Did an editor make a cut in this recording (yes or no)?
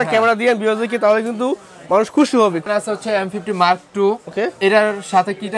yes